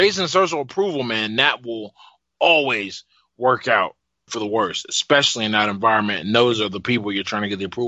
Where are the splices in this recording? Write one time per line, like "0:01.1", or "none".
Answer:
none